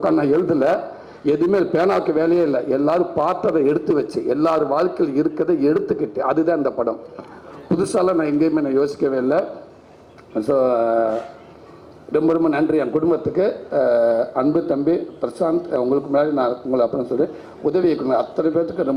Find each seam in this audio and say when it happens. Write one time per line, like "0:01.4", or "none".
none